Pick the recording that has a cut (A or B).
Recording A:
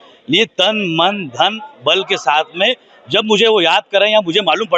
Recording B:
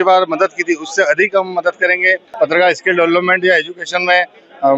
B